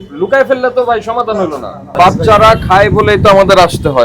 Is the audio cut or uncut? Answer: cut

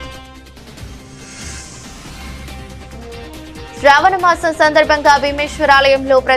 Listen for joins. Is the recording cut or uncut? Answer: cut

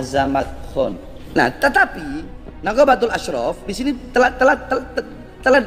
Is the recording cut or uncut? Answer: cut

